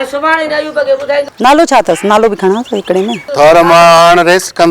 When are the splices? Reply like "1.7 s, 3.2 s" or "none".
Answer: 1.3 s, 3.3 s

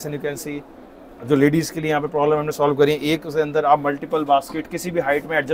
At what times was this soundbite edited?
none

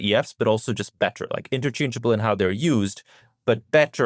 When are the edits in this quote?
none

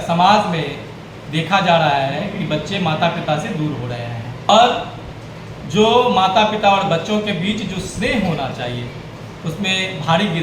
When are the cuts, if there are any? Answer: 4.5 s

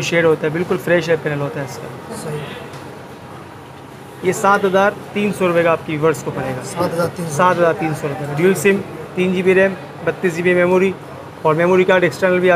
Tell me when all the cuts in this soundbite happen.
none

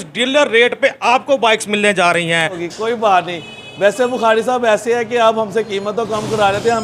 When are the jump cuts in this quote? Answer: 2.6 s

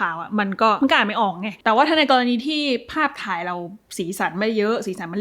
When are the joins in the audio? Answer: 1.2 s

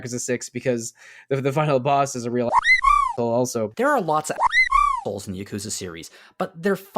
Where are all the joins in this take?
3.7 s

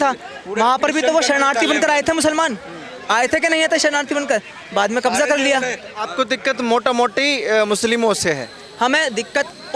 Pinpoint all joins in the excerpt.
none

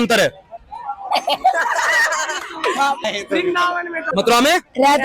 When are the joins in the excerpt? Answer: 3.0 s, 4.0 s

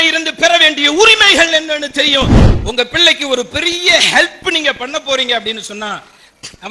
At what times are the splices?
2.4 s

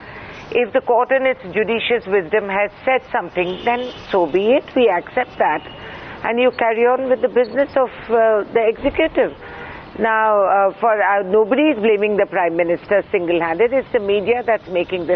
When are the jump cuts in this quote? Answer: 9.9 s

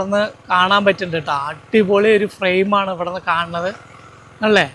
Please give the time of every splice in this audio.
none

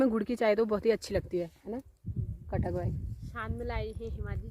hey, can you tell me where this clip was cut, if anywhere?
none

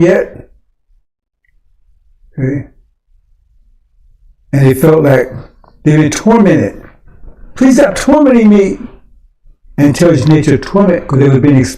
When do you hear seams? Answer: none

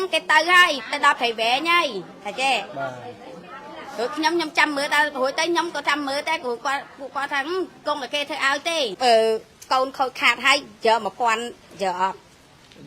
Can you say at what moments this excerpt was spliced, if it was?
8.9 s

